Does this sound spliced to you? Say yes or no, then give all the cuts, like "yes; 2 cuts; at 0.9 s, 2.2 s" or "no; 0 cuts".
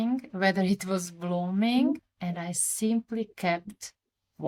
no; 0 cuts